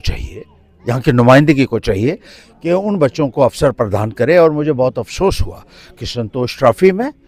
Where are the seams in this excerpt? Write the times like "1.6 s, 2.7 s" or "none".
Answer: none